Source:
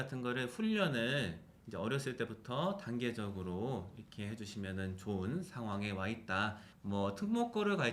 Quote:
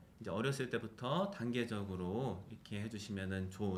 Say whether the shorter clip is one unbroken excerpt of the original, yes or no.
yes